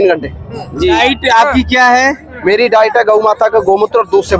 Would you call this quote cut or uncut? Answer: cut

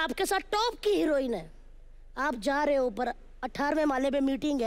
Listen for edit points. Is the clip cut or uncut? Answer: uncut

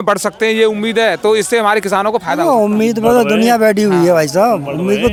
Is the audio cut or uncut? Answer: uncut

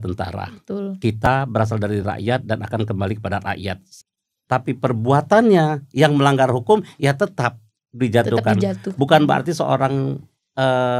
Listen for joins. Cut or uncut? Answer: cut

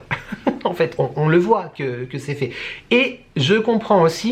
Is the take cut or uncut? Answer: uncut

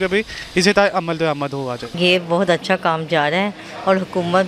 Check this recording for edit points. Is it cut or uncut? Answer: uncut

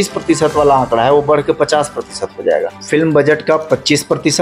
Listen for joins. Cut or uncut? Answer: cut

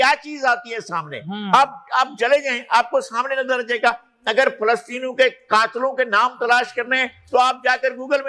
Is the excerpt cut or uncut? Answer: uncut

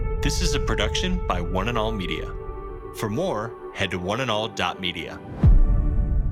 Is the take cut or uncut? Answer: uncut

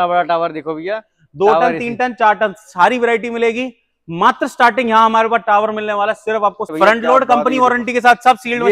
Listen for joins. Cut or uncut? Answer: cut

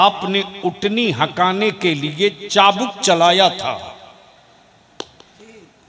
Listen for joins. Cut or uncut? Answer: uncut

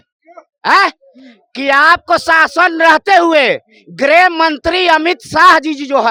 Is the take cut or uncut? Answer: uncut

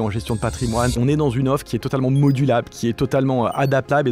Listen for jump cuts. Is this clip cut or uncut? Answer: cut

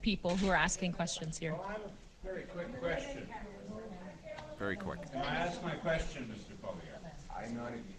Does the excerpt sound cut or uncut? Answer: uncut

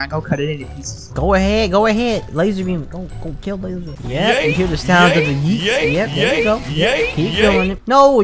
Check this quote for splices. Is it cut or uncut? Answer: uncut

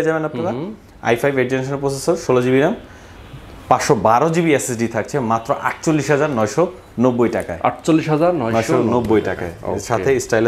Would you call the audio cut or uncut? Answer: uncut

